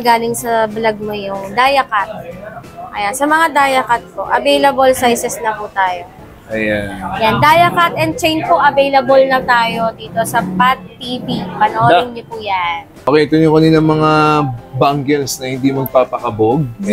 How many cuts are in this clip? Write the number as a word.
one